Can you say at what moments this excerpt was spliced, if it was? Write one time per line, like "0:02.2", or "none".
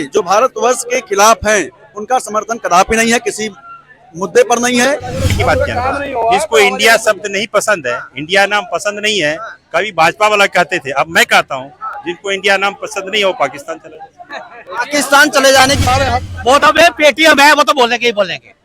0:05.3
0:15.9